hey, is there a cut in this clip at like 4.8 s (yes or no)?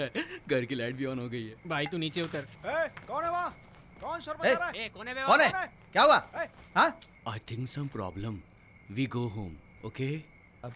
no